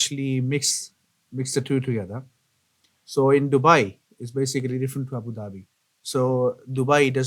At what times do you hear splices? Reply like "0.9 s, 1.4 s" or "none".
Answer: none